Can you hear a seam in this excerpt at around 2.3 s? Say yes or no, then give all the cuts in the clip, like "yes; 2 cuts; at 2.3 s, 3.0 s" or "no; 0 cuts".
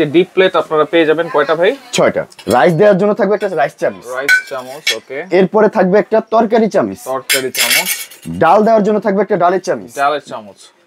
yes; 1 cut; at 2.3 s